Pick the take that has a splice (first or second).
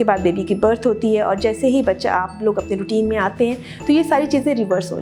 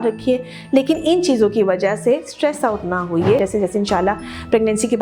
second